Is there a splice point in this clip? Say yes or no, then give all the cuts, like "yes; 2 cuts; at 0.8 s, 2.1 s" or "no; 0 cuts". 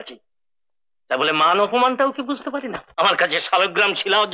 yes; 1 cut; at 2.8 s